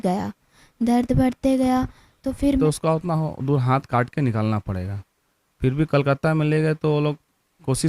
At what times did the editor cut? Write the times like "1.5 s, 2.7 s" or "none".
2.6 s

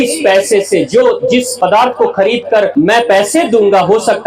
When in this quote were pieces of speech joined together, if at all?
1.5 s, 2.7 s

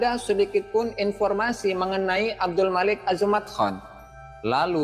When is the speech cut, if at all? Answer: none

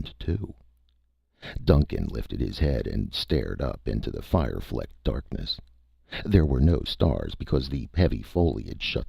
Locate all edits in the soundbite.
1.8 s

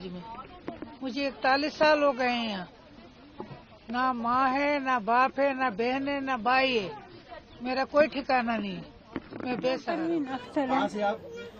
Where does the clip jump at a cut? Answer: 10.0 s

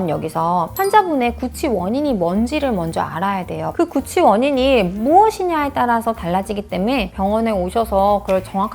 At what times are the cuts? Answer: none

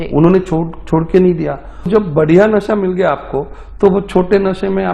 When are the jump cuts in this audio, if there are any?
1.9 s

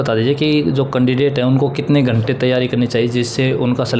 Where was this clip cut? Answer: none

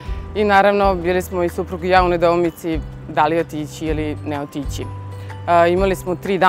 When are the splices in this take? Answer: none

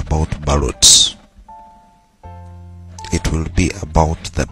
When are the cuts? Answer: 1.4 s, 3.1 s

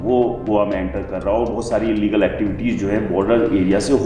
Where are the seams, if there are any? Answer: none

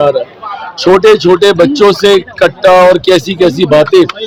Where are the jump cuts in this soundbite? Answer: none

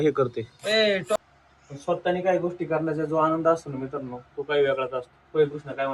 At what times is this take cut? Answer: 1.1 s

